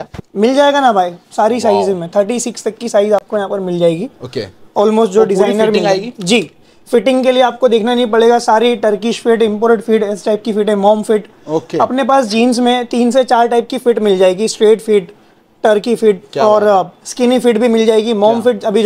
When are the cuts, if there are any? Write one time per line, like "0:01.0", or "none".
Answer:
none